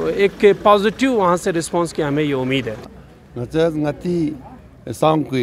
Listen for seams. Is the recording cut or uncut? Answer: uncut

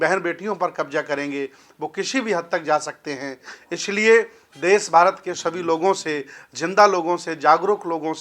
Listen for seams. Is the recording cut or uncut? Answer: uncut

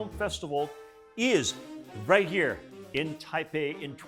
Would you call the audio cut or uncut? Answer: uncut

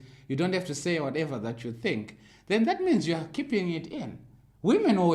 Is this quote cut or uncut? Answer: uncut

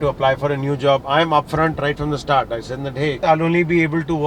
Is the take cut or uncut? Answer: cut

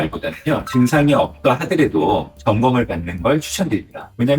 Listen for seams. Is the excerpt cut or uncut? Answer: cut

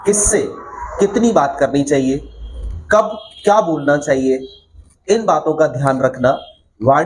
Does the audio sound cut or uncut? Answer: uncut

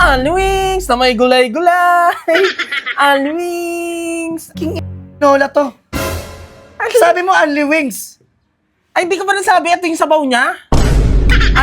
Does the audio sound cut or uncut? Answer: cut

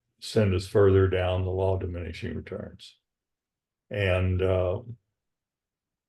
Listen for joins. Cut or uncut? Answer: uncut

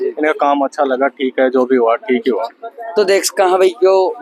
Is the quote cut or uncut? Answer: uncut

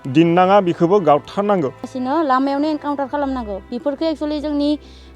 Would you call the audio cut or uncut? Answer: cut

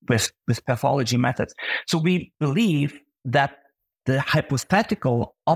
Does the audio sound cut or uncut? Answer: cut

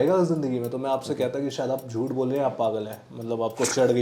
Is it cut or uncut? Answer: uncut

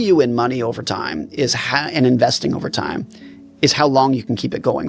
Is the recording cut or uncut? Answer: uncut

